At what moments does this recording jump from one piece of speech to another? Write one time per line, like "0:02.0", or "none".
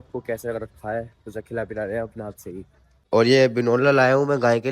0:03.0